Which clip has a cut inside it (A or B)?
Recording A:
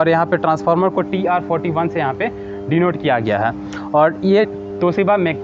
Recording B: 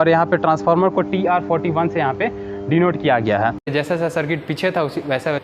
B